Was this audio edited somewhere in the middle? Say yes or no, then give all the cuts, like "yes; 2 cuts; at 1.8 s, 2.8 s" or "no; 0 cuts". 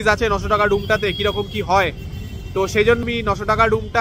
no; 0 cuts